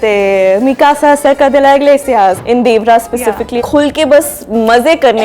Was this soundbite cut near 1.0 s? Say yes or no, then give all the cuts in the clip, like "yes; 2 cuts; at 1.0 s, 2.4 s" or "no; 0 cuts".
no; 2 cuts; at 2.4 s, 3.6 s